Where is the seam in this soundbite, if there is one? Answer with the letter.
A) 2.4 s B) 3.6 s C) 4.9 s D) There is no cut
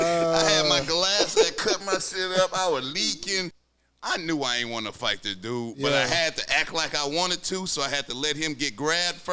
B